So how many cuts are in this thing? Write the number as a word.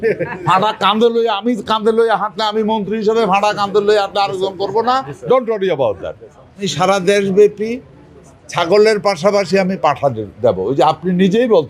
one